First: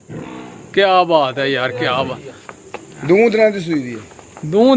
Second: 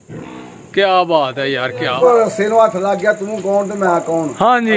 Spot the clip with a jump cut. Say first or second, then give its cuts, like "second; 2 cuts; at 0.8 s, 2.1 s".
second; 1 cut; at 2.0 s